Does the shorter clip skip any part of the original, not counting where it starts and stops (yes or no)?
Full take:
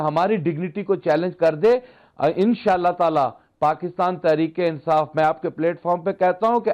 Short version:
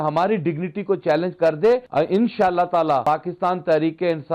yes